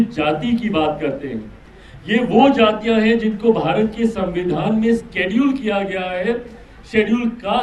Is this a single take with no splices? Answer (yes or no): yes